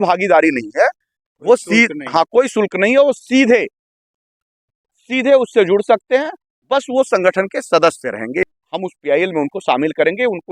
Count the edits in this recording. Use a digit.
1